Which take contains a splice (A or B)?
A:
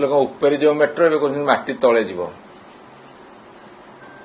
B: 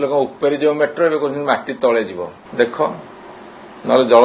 B